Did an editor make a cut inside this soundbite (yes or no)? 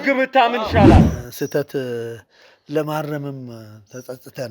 yes